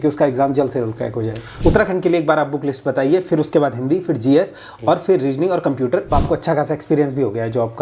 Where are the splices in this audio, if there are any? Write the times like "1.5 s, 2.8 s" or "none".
1.5 s, 6.1 s